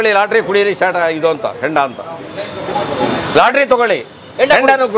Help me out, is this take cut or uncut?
uncut